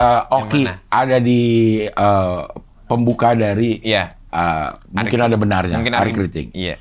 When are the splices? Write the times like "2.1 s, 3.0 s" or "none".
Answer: none